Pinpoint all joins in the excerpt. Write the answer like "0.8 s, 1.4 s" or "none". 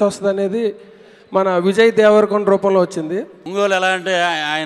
3.4 s